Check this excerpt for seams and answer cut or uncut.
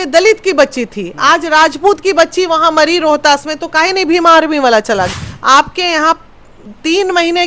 cut